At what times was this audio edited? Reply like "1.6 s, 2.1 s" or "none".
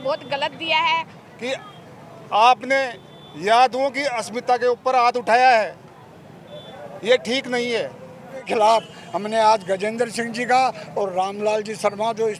1.2 s, 8.5 s

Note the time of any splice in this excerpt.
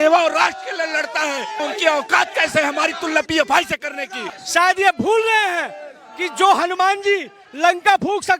1.6 s, 4.2 s

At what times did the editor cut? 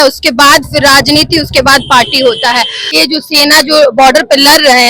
2.9 s

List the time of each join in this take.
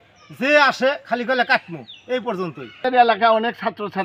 2.8 s

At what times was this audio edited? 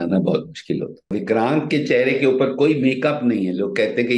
1.1 s

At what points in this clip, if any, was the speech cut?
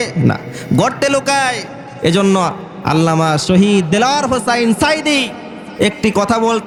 none

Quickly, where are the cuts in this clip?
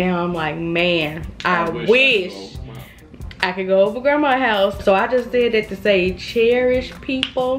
4.8 s

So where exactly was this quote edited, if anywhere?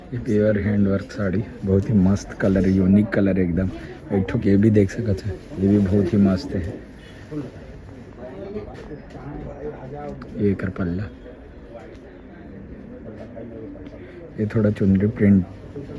none

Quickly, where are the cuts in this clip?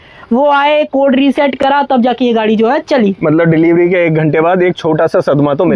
none

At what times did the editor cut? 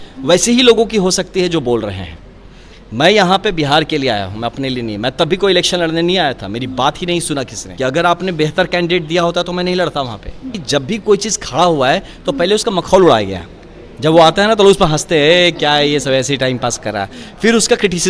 7.7 s, 10.6 s

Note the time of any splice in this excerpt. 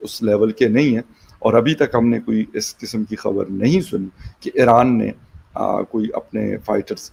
none

